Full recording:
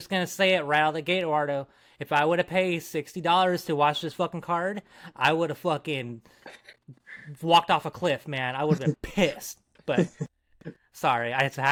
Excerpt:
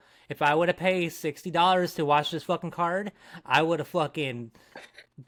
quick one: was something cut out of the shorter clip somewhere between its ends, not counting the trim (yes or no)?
no